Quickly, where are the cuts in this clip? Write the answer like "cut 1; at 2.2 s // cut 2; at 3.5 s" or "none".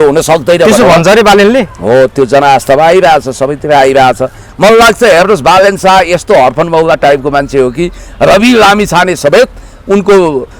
cut 1; at 4.4 s